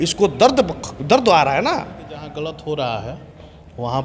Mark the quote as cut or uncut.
cut